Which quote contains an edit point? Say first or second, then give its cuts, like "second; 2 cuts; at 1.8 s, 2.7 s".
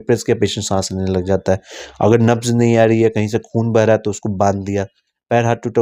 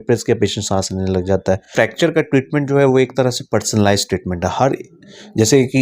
second; 1 cut; at 1.7 s